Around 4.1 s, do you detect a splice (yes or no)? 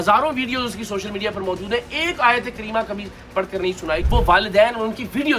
yes